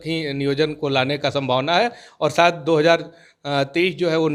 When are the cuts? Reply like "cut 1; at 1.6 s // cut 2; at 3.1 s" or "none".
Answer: none